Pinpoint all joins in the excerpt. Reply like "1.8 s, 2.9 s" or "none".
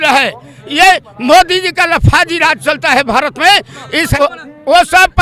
4.1 s